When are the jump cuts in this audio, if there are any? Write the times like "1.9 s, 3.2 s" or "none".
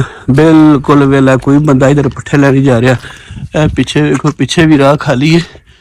none